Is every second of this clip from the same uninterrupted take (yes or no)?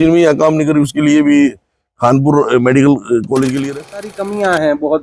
no